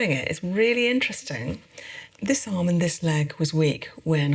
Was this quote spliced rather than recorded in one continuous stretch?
yes; 1 cut; at 2.0 s

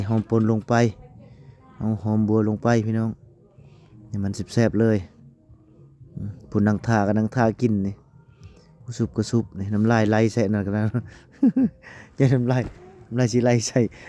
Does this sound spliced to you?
no; 0 cuts

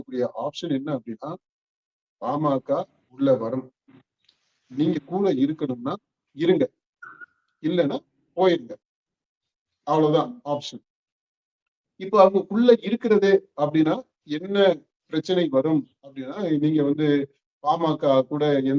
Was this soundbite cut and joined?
no; 0 cuts

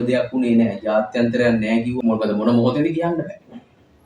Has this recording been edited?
yes; 1 cut; at 2.0 s

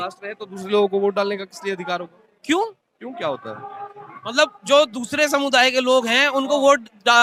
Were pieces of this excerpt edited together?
no; 0 cuts

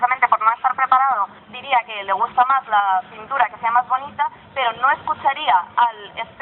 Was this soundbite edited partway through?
no; 0 cuts

